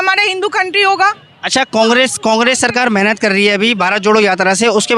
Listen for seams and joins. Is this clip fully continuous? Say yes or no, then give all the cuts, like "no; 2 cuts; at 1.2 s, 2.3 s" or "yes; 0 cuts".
yes; 0 cuts